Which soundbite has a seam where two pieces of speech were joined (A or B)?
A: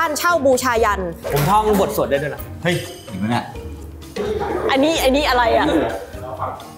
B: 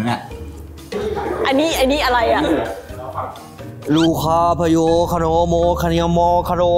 A